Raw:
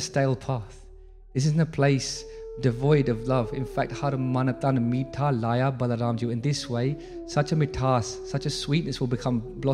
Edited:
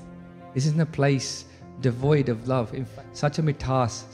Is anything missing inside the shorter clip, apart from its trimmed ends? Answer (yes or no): yes